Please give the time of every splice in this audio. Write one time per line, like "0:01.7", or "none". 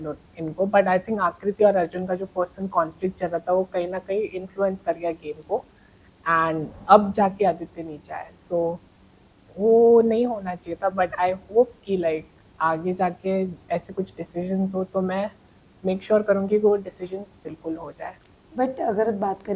none

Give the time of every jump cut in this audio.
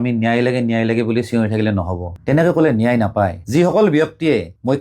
0:02.1
0:03.4

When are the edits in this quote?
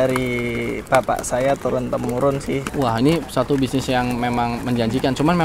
0:02.7

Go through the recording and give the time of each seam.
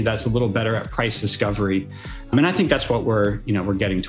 0:02.3

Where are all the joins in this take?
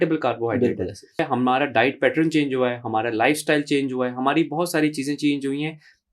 0:01.2

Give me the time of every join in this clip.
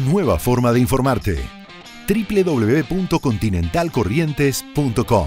0:03.5

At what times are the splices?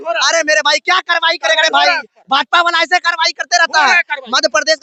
none

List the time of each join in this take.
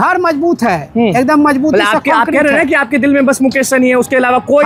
none

